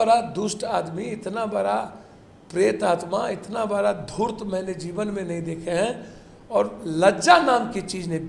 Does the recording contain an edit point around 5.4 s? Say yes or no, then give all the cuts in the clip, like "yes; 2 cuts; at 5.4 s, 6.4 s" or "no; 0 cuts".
no; 0 cuts